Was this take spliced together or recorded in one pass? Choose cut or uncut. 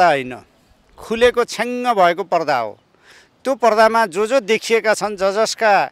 uncut